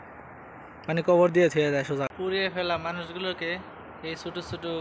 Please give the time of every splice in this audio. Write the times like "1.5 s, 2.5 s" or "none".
2.1 s